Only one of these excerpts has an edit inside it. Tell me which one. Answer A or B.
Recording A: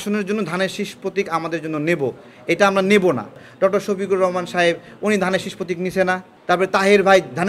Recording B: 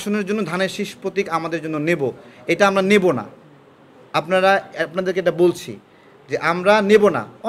A